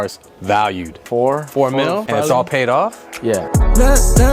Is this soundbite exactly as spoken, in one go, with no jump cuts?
no; 3 cuts; at 1.0 s, 2.1 s, 3.4 s

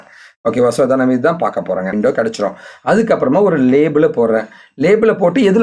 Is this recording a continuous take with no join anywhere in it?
no; 1 cut; at 1.9 s

